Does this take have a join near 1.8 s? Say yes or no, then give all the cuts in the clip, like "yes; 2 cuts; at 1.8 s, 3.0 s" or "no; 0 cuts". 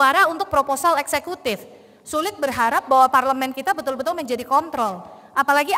no; 0 cuts